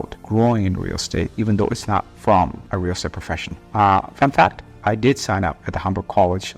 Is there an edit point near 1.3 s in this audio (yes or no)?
no